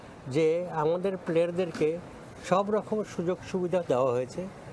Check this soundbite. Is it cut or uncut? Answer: uncut